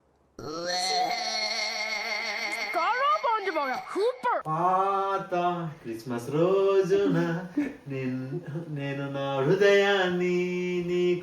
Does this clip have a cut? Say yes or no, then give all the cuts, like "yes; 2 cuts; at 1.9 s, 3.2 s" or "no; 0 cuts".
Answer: yes; 1 cut; at 4.4 s